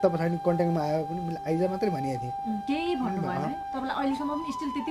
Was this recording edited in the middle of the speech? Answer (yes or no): no